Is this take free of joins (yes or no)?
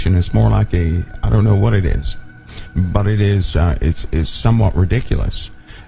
no